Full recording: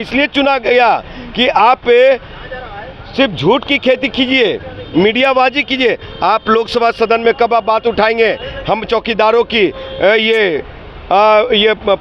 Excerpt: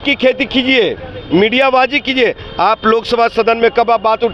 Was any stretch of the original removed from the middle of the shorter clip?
no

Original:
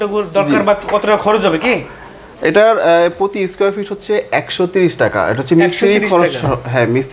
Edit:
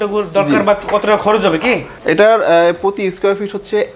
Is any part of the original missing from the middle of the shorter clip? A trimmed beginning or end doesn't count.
yes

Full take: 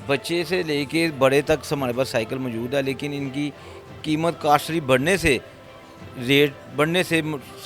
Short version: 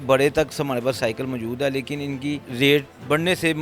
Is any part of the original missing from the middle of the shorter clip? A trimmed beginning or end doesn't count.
yes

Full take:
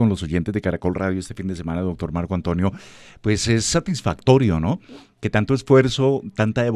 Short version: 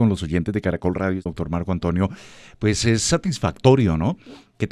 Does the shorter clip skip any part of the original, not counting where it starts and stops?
yes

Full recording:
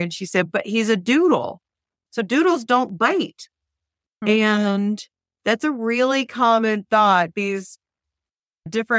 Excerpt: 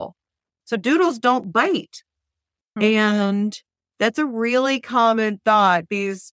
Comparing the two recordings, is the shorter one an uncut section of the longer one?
yes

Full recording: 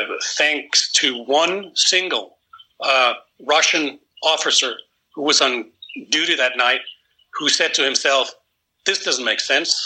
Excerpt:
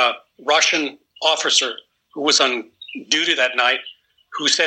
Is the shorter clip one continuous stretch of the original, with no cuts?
yes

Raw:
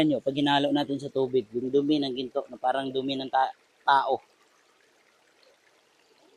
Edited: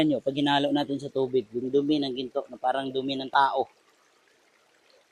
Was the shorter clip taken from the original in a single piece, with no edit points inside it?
no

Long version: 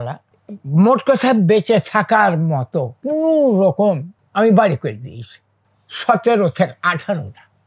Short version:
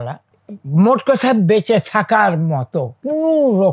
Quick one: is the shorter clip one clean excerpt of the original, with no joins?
yes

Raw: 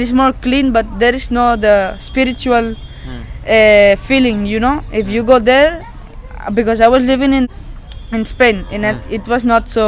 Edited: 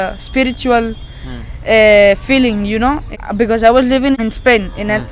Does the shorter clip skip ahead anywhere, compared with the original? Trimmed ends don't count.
yes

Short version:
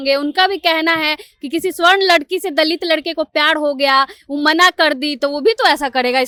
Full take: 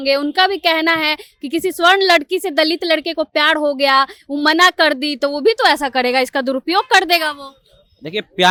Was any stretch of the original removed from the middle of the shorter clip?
no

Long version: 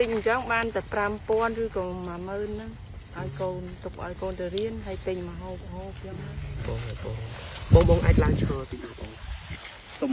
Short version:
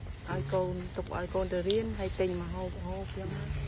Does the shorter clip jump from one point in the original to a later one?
no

